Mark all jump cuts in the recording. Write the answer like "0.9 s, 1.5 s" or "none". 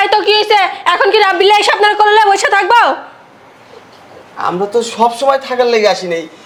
none